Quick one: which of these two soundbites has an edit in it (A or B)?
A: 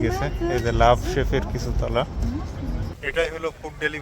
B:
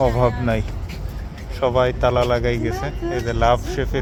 A